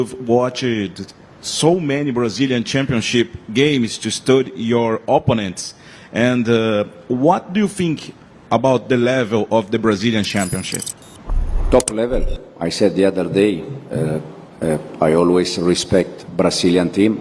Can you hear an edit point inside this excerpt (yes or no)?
no